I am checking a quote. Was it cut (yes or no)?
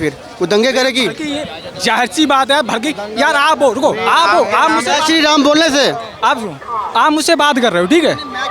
no